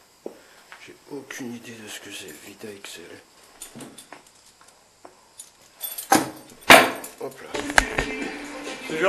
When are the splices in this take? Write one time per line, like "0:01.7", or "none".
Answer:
0:07.5